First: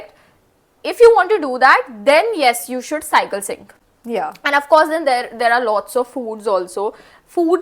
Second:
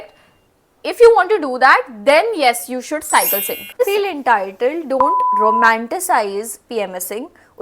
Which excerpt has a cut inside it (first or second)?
second